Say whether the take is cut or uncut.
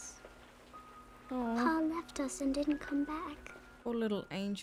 uncut